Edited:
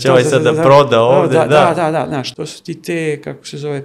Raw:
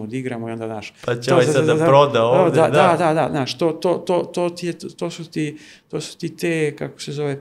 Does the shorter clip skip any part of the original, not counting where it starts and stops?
yes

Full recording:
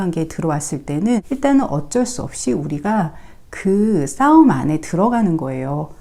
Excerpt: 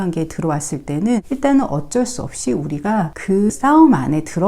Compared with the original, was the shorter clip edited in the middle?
yes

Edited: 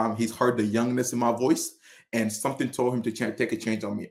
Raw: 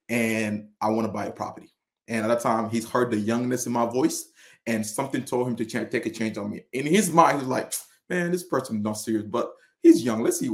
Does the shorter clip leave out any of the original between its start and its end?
no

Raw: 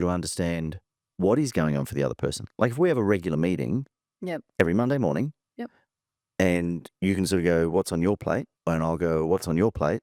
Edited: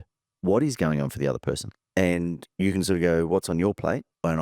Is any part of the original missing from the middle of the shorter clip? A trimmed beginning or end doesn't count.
yes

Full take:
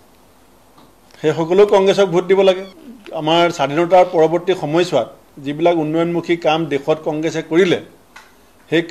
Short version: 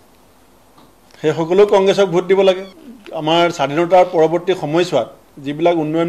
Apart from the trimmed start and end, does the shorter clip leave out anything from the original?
no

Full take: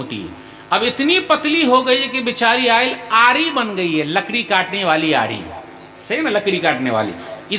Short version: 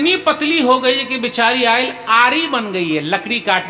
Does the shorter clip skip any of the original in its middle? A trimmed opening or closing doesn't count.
no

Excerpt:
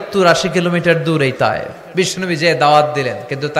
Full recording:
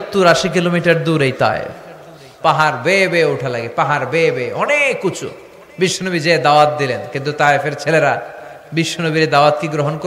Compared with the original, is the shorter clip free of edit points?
no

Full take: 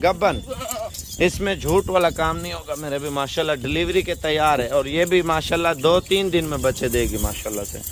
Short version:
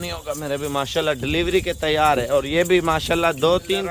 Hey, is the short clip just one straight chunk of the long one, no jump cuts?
yes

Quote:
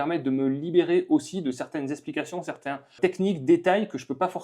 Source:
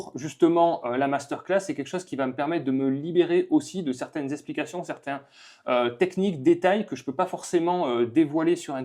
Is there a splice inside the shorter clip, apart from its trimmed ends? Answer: yes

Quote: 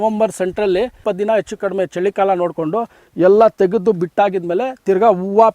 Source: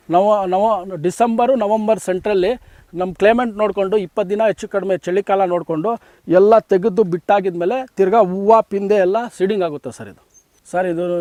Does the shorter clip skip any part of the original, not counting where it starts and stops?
yes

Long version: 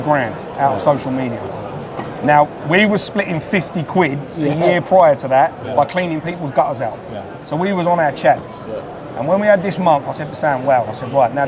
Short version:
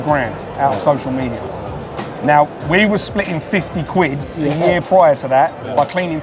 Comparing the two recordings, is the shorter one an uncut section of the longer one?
yes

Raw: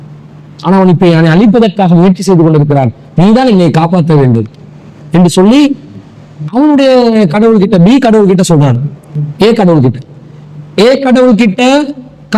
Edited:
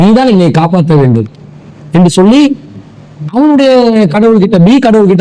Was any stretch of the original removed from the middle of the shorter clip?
no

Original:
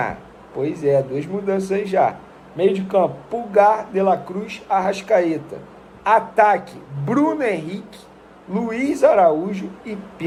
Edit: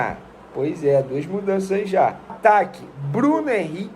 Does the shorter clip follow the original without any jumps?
no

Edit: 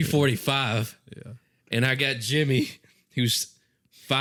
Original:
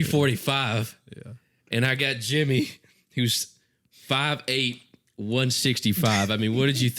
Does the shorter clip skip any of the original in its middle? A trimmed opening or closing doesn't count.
no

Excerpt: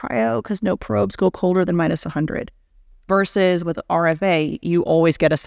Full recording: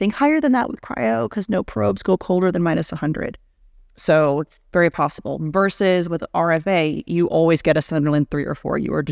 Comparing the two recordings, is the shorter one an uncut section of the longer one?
no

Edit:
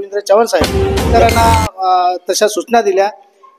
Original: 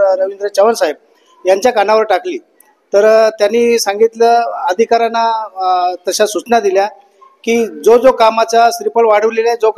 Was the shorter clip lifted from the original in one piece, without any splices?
no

